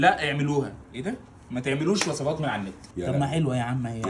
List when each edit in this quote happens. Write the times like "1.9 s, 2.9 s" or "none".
2.8 s